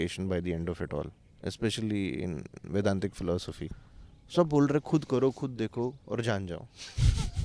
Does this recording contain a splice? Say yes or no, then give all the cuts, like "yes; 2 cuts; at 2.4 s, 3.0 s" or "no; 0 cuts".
yes; 1 cut; at 3.6 s